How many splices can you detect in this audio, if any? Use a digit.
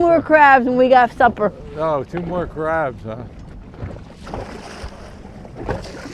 1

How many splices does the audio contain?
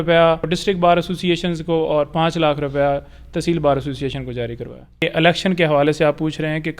1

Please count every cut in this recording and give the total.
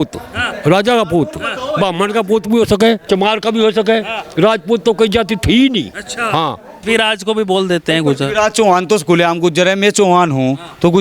2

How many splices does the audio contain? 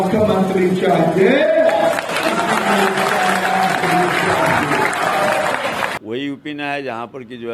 1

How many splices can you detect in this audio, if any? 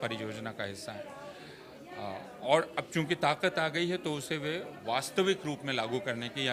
0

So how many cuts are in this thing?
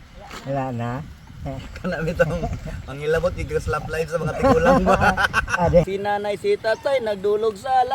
1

